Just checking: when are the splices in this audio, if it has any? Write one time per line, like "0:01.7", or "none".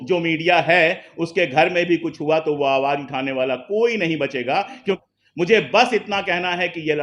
0:05.0

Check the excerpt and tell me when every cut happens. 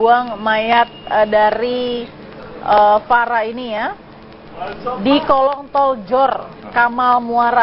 0:02.7

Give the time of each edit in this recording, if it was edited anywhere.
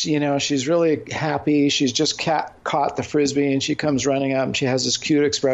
none

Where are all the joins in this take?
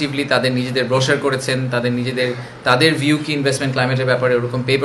none

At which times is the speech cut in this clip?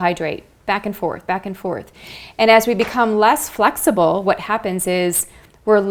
none

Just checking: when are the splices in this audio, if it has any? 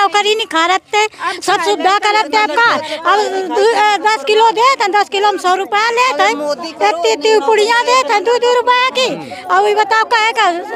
none

